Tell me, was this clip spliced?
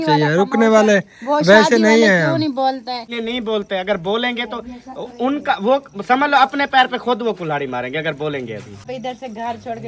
yes; 2 cuts; at 3.1 s, 8.9 s

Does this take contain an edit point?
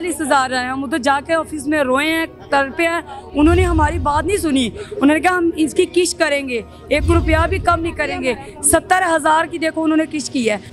no; 0 cuts

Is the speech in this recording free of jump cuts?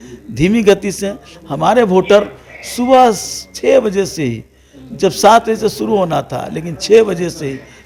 yes; 0 cuts

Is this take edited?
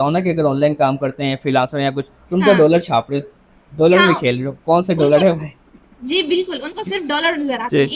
no; 0 cuts

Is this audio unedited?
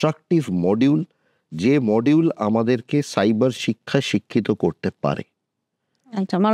yes; 0 cuts

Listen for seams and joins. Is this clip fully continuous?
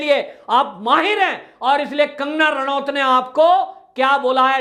yes; 0 cuts

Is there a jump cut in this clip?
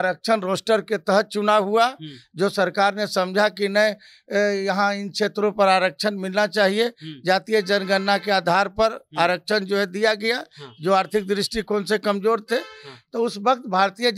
no; 0 cuts

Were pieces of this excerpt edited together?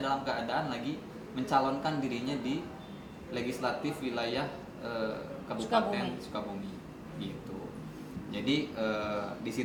no; 0 cuts

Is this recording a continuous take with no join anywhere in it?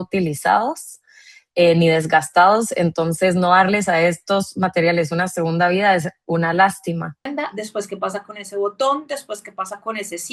no; 1 cut; at 7.3 s

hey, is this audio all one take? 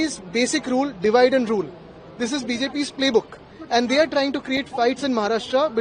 yes; 0 cuts

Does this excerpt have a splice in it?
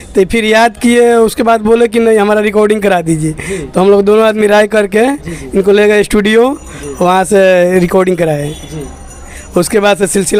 no; 0 cuts

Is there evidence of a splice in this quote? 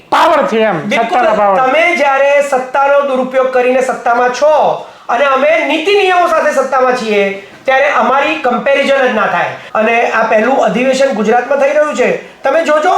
yes; 1 cut; at 9.6 s

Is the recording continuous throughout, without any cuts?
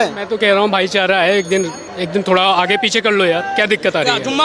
yes; 0 cuts

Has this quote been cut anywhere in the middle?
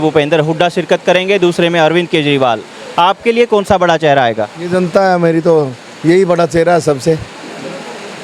no; 0 cuts

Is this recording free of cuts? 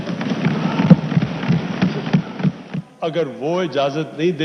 no; 1 cut; at 2.6 s

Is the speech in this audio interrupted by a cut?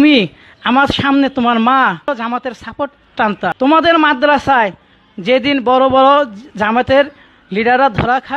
yes; 2 cuts; at 2.0 s, 3.5 s

